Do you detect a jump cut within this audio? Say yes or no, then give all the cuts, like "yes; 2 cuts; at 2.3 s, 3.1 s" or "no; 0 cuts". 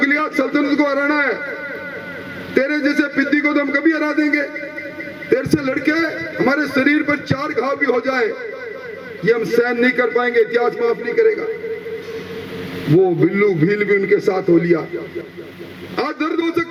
no; 0 cuts